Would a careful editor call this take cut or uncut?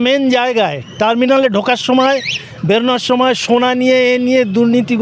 uncut